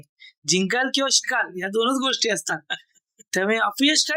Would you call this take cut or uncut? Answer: uncut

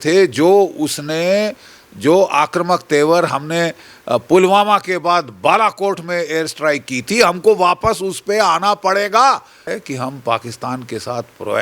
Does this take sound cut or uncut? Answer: cut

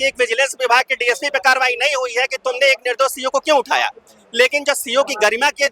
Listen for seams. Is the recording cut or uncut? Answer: uncut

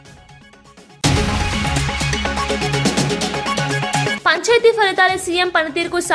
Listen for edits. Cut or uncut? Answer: cut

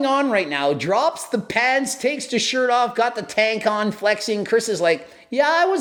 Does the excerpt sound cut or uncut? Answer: uncut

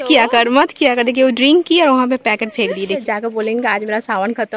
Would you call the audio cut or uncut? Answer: cut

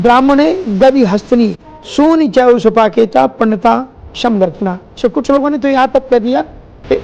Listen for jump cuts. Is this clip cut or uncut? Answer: cut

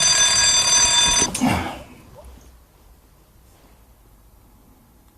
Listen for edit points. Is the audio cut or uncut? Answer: cut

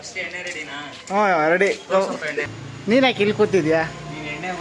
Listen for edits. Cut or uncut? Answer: cut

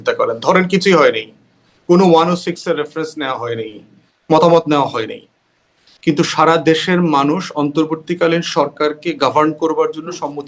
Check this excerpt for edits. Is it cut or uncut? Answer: uncut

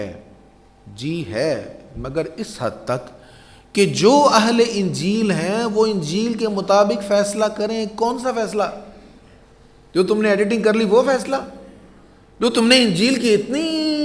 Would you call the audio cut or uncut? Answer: uncut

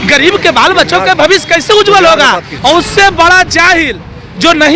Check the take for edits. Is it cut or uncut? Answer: cut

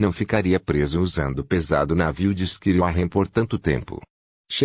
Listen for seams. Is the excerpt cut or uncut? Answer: uncut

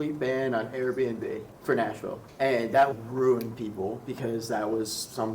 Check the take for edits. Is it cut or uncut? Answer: cut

